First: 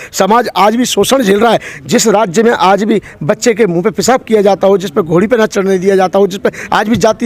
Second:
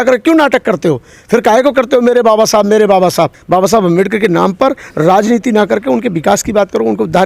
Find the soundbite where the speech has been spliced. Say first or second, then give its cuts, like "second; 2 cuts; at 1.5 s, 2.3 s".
second; 1 cut; at 3.4 s